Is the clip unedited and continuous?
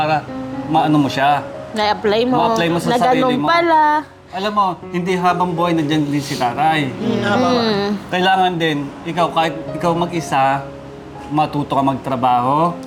yes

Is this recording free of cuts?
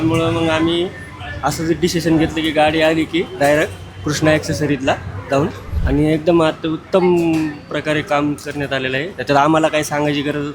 no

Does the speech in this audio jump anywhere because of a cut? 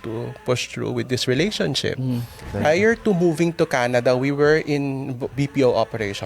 yes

